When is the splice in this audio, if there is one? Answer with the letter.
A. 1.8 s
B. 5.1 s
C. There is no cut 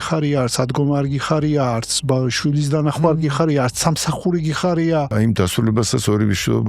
B